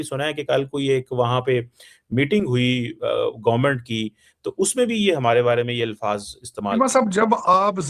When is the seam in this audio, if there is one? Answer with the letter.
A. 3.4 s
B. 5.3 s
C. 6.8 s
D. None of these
C